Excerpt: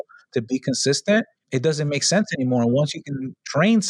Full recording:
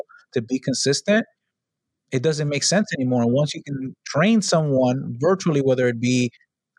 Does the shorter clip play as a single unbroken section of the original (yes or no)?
no